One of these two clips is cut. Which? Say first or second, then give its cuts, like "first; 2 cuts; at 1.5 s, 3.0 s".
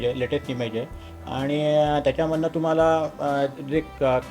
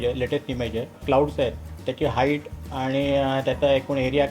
second; 1 cut; at 1.0 s